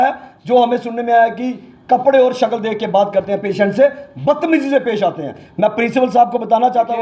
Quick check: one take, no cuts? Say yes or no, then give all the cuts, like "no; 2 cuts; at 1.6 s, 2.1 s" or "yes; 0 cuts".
yes; 0 cuts